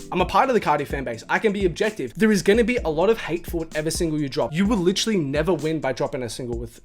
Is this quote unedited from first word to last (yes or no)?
no